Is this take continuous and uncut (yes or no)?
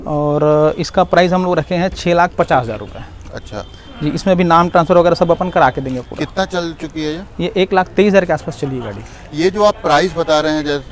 yes